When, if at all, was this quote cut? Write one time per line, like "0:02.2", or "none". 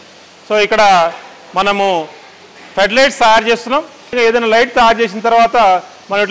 0:04.2